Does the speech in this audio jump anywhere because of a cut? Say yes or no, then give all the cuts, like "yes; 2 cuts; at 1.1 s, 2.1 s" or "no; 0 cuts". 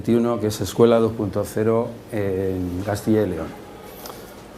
yes; 1 cut; at 2.7 s